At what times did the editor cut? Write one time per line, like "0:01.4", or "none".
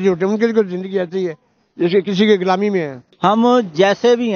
0:03.0